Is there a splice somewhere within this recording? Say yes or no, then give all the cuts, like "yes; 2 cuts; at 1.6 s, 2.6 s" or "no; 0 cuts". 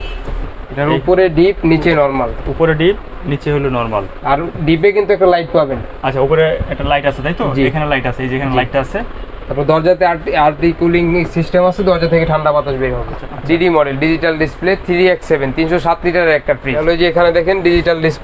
yes; 2 cuts; at 13.2 s, 16.7 s